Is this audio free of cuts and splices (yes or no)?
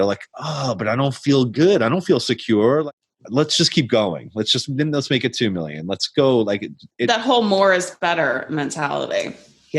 no